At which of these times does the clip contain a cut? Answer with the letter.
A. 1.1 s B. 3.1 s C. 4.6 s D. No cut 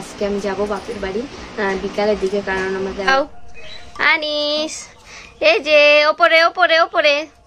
B